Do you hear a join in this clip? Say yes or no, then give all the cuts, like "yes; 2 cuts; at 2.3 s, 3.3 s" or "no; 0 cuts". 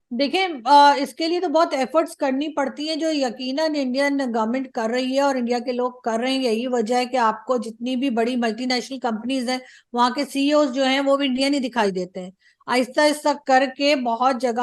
no; 0 cuts